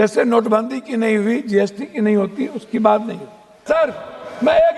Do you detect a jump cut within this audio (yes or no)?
yes